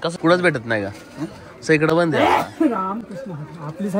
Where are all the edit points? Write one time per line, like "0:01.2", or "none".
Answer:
none